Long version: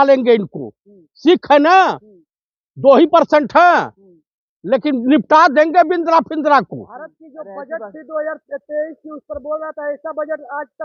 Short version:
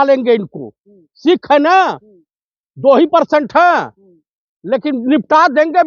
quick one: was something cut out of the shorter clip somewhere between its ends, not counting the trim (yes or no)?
no